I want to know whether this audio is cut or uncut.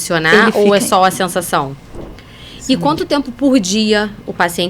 cut